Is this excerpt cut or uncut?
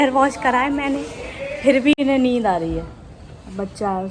uncut